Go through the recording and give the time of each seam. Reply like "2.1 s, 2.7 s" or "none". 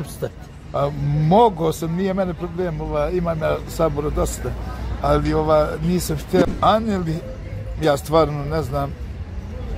6.4 s